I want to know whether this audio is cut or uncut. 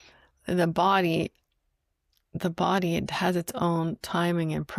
uncut